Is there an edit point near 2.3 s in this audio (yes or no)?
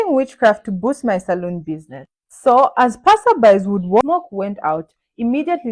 no